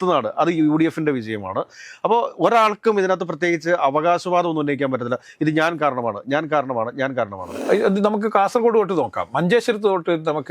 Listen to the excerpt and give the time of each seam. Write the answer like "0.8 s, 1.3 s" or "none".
7.7 s